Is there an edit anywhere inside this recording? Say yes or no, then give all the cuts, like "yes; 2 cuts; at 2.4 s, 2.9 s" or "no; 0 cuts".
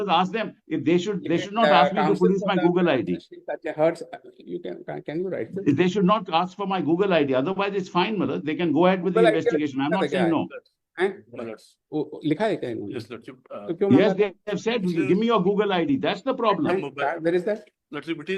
no; 0 cuts